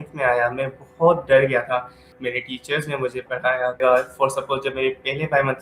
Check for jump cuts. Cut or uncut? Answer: cut